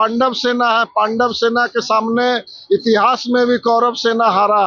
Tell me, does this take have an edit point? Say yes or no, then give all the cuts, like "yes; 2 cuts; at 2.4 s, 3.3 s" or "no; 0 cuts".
no; 0 cuts